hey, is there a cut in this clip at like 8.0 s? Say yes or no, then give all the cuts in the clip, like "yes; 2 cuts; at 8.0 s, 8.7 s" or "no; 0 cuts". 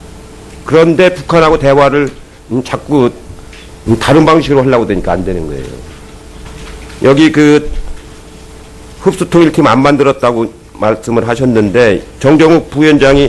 yes; 1 cut; at 8.0 s